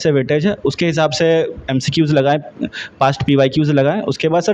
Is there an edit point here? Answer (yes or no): no